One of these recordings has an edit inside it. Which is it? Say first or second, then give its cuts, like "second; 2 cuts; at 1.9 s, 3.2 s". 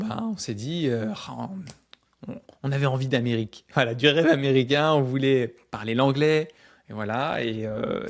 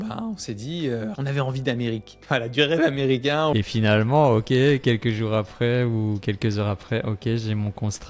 second; 2 cuts; at 1.2 s, 3.5 s